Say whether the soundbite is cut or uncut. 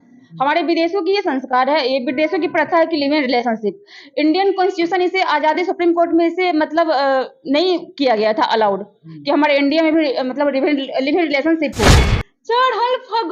cut